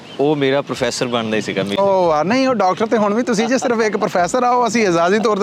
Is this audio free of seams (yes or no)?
yes